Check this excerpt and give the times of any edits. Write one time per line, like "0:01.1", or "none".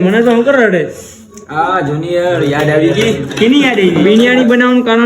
0:04.0